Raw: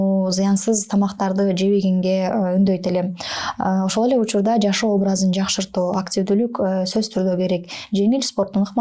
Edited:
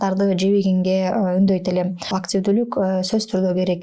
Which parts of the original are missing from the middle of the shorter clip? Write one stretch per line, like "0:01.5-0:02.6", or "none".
0:03.3-0:06.0